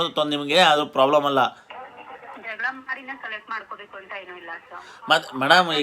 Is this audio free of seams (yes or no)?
no